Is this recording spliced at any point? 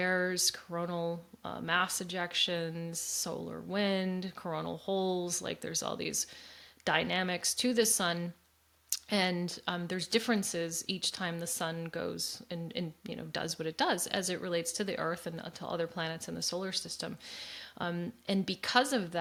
no; 0 cuts

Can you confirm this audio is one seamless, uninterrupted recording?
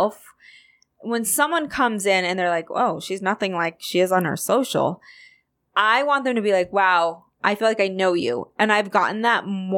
yes; 0 cuts

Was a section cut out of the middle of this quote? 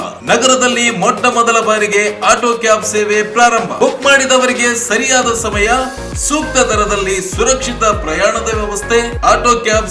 no; 0 cuts

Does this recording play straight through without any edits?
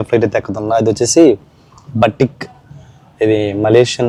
yes; 0 cuts

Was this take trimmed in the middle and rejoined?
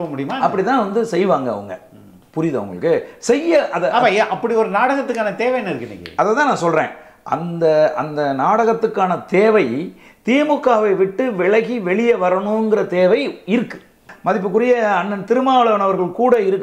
yes; 1 cut; at 14.1 s

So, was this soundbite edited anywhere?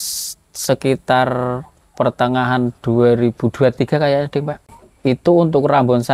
yes; 1 cut; at 4.6 s

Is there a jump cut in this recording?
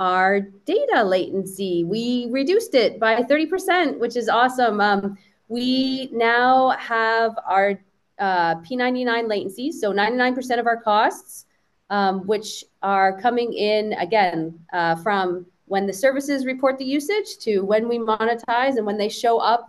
no; 0 cuts

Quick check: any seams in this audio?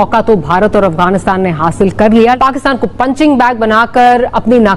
yes; 1 cut; at 2.4 s

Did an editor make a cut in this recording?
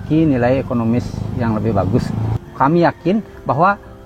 yes; 1 cut; at 2.3 s

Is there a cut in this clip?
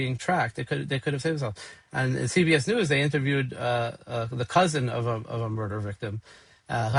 no; 0 cuts

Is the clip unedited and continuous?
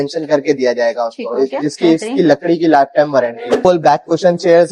no; 1 cut; at 3.5 s

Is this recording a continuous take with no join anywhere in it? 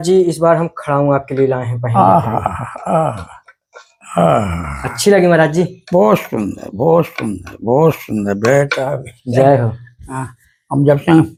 yes; 0 cuts

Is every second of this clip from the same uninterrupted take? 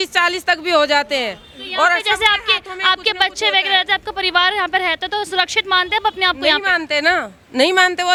yes; 0 cuts

